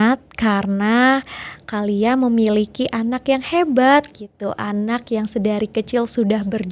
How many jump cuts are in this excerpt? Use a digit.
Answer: 0